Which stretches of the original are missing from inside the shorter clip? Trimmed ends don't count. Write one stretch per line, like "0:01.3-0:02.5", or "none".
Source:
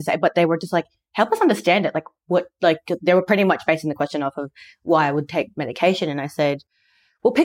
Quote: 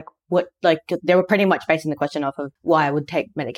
0:04.5-0:04.7